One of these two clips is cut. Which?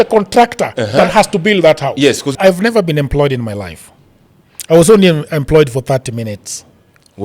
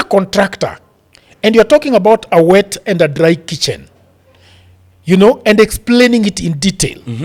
first; 1 cut; at 2.3 s

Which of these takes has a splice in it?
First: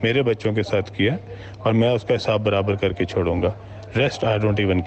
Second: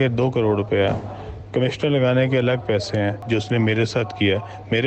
second; 1 cut; at 3.2 s

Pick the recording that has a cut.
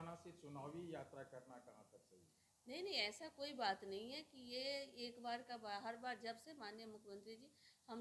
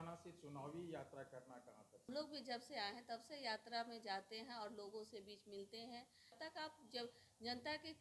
second; 2 cuts; at 2.1 s, 6.4 s

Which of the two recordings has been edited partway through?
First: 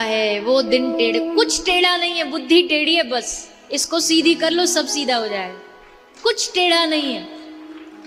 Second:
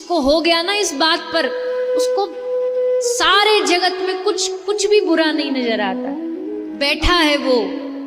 second; 1 cut; at 6.6 s

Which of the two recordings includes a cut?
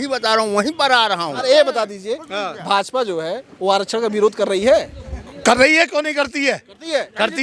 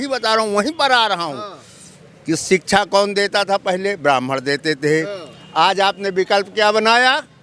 first; 1 cut; at 1.4 s

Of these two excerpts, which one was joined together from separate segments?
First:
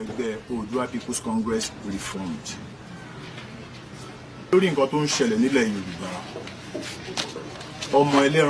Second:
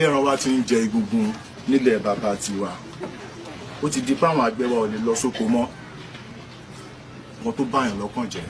second; 1 cut; at 7.4 s

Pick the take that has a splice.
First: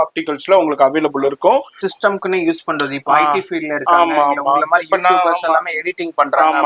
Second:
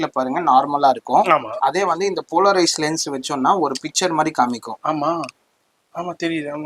first; 1 cut; at 1.8 s

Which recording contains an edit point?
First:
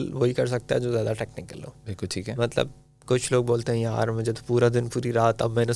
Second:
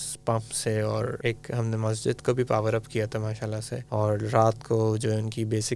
second; 2 cuts; at 1.2 s, 3.7 s

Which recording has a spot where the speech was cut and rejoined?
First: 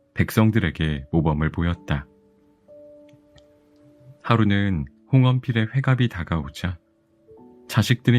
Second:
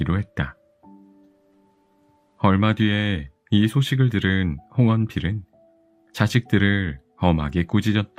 first; 2 cuts; at 2.5 s, 4.2 s

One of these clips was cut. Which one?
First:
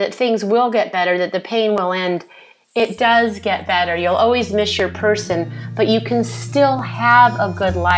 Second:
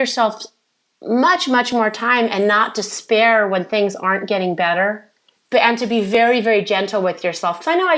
second; 1 cut; at 5.0 s

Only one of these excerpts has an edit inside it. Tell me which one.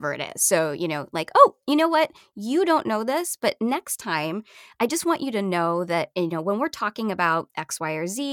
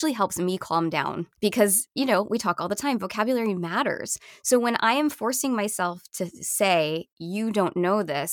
second; 1 cut; at 1.3 s

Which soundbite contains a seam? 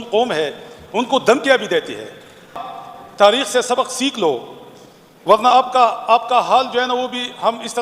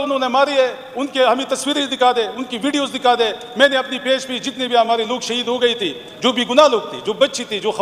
first; 1 cut; at 2.7 s

